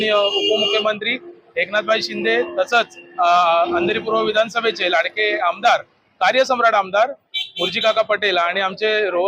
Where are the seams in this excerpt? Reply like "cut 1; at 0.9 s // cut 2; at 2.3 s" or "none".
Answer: none